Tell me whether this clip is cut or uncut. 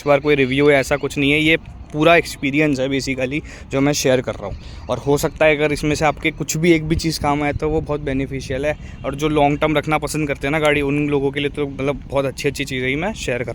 uncut